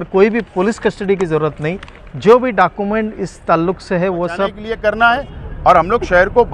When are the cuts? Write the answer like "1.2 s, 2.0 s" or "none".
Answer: 4.7 s